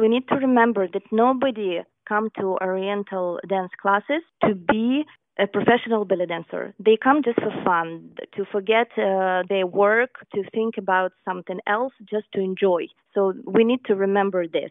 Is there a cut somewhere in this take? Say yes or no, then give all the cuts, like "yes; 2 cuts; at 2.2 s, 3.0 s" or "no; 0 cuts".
yes; 4 cuts; at 4.3 s, 5.2 s, 10.2 s, 13.0 s